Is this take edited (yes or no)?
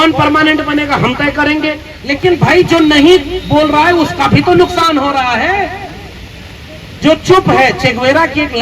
yes